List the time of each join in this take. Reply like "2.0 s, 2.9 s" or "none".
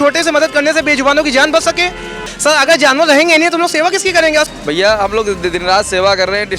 2.2 s, 4.5 s